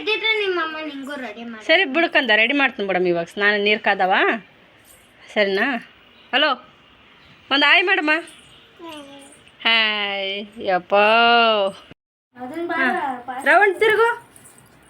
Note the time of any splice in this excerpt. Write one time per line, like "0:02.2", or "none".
0:11.9